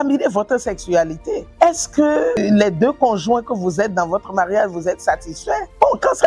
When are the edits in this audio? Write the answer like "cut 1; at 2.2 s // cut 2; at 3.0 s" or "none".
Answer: cut 1; at 1.5 s